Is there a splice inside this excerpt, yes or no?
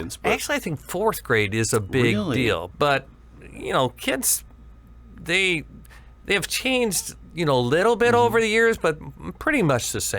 yes